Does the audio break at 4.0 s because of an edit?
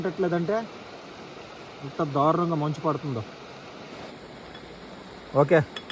yes; 1 cut; at 4.0 s

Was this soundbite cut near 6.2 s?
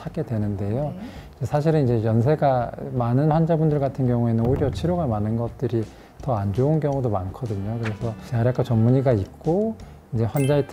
no; 0 cuts

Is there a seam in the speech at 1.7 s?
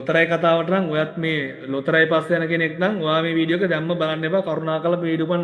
no; 0 cuts

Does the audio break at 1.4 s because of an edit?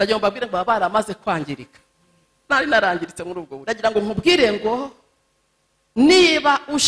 no; 1 cut; at 3.5 s

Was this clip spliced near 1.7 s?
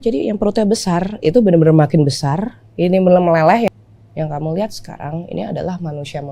no; 1 cut; at 3.7 s

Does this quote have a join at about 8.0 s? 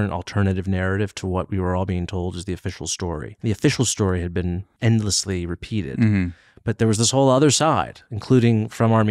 no; 2 cuts; at 3.3 s, 4.7 s

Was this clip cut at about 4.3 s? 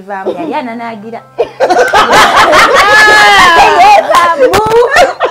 yes; 1 cut; at 4.3 s

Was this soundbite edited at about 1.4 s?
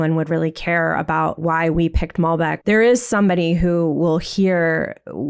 yes; 2 cuts; at 1.4 s, 2.6 s

